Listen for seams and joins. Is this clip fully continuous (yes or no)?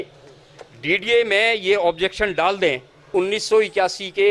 no